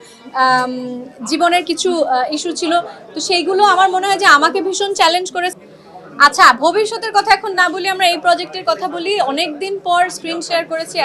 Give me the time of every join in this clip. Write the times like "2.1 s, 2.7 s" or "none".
5.5 s

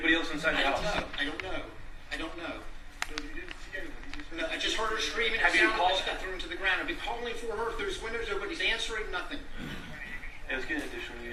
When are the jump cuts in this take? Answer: none

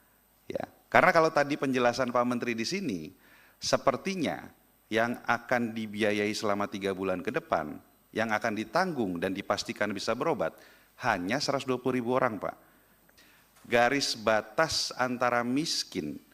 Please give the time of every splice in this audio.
13.1 s

